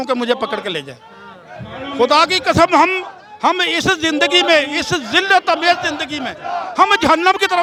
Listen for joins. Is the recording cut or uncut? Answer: uncut